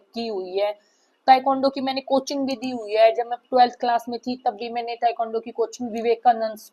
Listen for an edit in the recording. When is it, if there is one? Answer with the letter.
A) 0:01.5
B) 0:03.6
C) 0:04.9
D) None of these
D